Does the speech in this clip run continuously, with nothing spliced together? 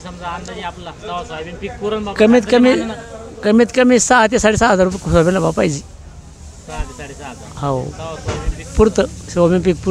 yes; 0 cuts

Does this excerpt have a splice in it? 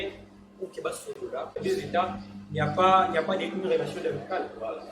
yes; 1 cut; at 1.6 s

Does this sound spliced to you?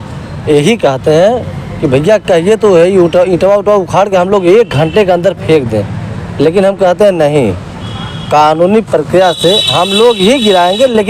no; 0 cuts

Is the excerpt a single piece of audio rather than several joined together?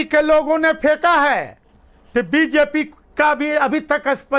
yes; 0 cuts

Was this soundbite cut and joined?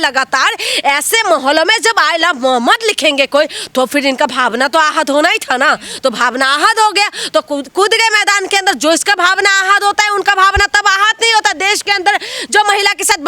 no; 0 cuts

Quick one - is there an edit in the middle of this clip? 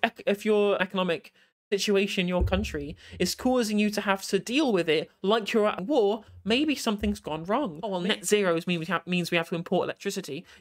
yes; 3 cuts; at 0.8 s, 5.8 s, 7.9 s

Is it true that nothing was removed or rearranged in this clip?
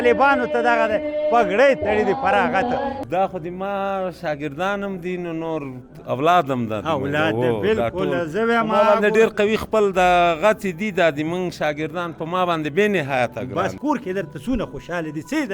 no; 2 cuts; at 3.0 s, 13.8 s

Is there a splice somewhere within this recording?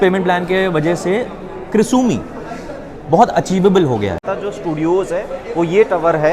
yes; 1 cut; at 4.3 s

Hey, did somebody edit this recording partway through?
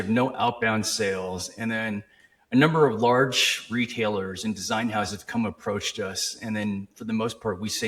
no; 0 cuts

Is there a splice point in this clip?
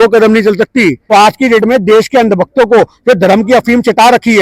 yes; 1 cut; at 1.0 s

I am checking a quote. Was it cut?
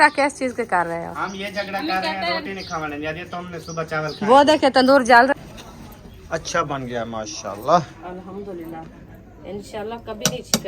yes; 1 cut; at 5.3 s

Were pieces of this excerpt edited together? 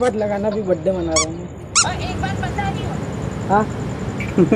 yes; 1 cut; at 1.8 s

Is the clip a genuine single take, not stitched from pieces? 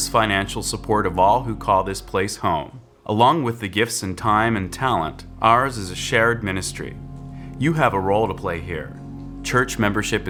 yes; 0 cuts

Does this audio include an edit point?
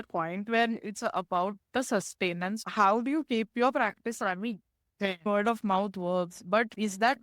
yes; 2 cuts; at 2.6 s, 5.3 s

